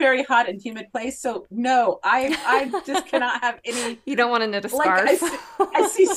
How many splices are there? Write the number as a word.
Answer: zero